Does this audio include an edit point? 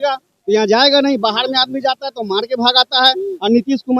no; 0 cuts

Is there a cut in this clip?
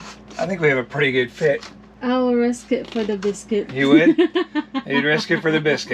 yes; 1 cut; at 2.0 s

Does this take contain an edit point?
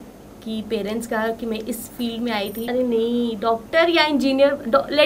yes; 1 cut; at 2.6 s

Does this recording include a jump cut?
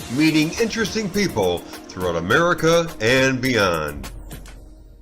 yes; 1 cut; at 4.0 s

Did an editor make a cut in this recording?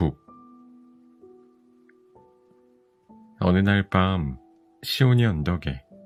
no; 0 cuts

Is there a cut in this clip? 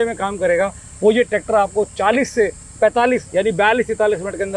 no; 0 cuts

